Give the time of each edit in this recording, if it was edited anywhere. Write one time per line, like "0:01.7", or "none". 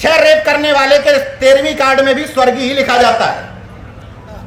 none